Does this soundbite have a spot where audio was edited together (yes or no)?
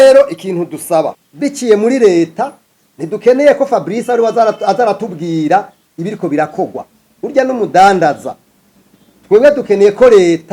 yes